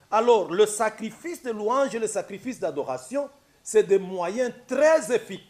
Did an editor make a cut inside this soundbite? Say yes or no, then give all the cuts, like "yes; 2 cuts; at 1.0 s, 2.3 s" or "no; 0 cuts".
no; 0 cuts